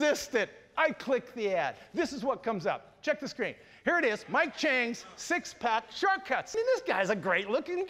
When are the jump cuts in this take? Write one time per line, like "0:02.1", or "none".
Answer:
0:06.5